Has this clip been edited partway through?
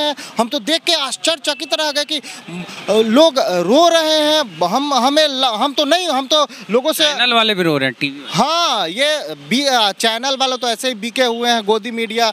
no; 0 cuts

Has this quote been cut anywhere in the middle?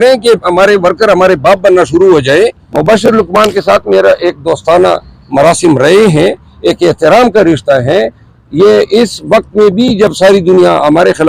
yes; 1 cut; at 2.7 s

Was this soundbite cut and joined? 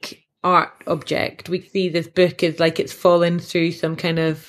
yes; 1 cut; at 1.6 s

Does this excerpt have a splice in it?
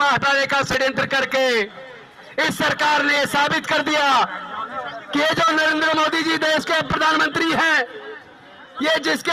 no; 0 cuts

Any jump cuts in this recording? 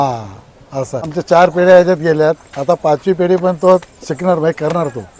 yes; 1 cut; at 1.2 s

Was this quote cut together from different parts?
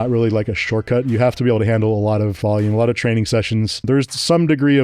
yes; 2 cuts; at 2.3 s, 3.9 s

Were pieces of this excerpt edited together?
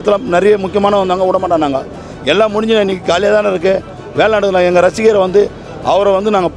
no; 0 cuts

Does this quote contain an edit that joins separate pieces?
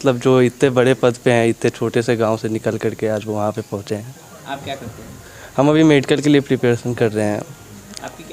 no; 0 cuts

